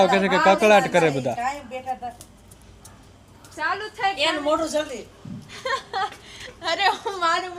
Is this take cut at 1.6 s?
no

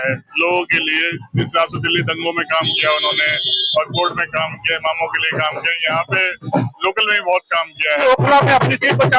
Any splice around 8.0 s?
yes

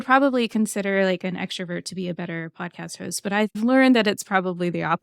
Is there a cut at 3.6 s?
yes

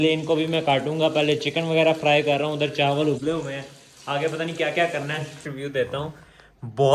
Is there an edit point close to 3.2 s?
no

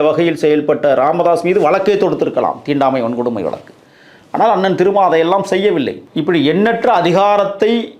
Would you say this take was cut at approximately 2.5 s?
no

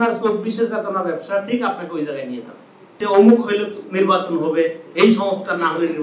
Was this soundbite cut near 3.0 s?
yes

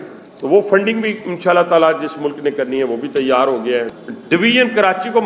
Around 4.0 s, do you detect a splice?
yes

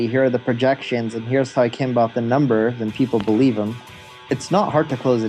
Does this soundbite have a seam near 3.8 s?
yes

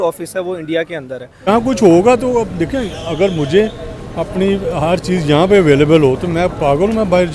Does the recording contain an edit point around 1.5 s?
yes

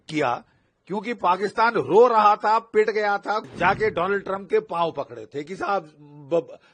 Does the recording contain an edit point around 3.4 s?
yes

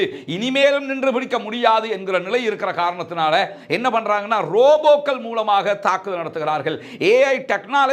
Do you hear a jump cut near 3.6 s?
no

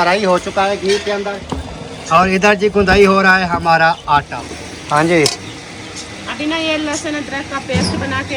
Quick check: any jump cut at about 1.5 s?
yes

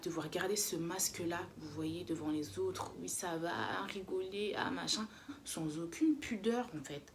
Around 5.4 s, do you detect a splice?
yes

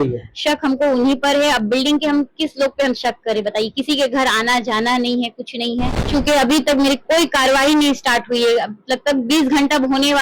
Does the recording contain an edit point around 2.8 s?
no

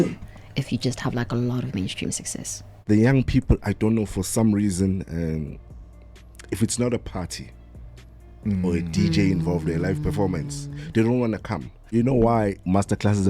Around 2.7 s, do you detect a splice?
yes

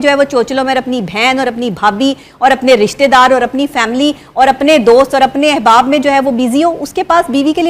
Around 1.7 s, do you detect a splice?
no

